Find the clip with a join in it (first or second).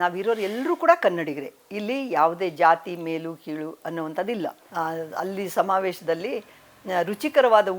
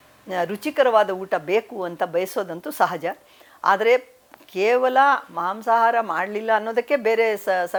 first